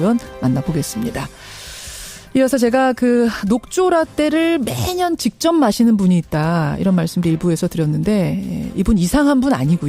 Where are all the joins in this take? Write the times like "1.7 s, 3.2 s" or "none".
8.2 s